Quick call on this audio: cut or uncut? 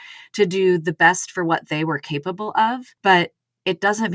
cut